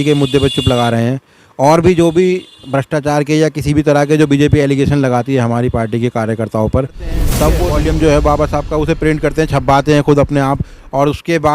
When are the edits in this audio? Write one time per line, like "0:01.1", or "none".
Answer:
0:07.5